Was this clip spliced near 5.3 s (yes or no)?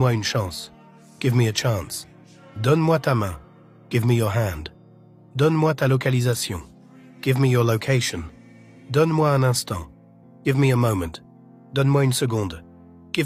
no